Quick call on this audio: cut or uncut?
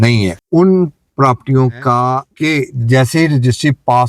cut